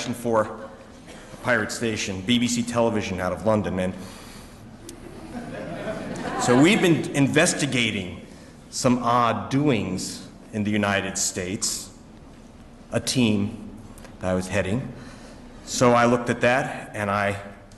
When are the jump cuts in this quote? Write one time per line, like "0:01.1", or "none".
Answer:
none